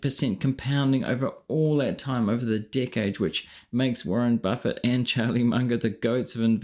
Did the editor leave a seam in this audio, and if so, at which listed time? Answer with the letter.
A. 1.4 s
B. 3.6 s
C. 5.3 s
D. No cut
D